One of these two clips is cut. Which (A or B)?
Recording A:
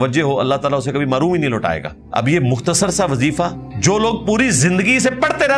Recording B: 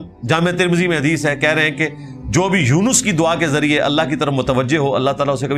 A